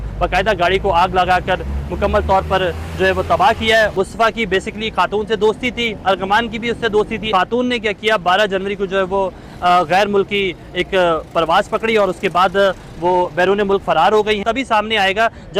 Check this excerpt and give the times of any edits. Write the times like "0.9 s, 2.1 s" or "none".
3.9 s, 7.3 s, 14.4 s